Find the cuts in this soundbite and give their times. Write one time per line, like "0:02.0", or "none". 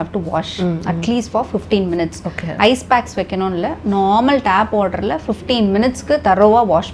none